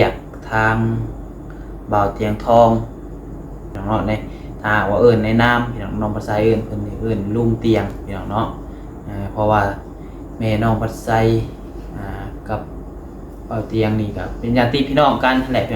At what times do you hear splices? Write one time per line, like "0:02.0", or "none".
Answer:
0:03.7